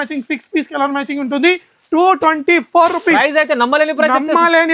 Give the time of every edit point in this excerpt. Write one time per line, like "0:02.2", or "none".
none